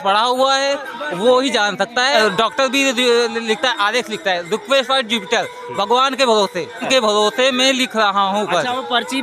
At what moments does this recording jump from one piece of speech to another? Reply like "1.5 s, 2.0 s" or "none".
2.1 s, 6.8 s